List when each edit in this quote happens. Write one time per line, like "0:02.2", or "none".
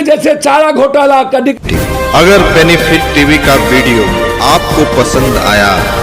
0:01.6